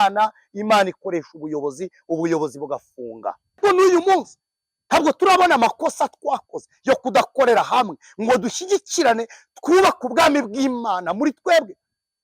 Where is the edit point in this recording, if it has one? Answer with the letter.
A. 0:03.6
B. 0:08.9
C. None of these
A